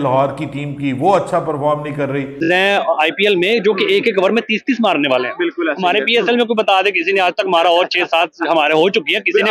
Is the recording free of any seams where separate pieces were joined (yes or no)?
no